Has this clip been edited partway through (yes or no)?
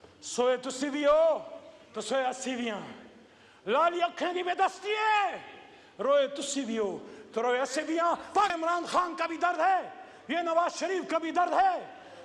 yes